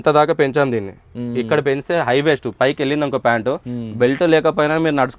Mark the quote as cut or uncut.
uncut